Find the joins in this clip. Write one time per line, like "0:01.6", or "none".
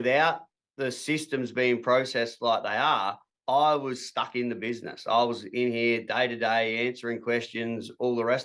none